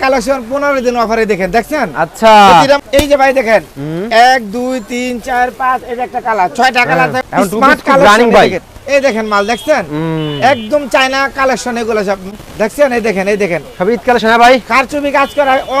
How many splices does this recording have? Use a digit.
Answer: 3